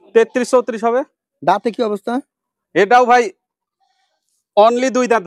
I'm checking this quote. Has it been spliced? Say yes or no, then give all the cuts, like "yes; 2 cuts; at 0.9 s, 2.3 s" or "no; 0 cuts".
no; 0 cuts